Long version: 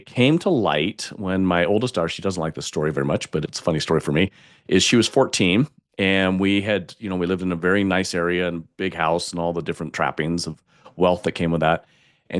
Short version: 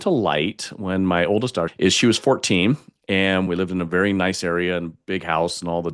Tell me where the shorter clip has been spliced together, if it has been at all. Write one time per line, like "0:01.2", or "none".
0:01.7
0:03.5